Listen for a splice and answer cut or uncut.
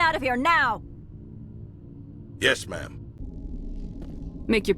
cut